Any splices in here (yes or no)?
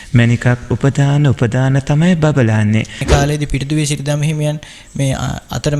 yes